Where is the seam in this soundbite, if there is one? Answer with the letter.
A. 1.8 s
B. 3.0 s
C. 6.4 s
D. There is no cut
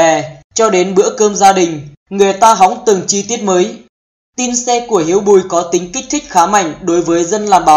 B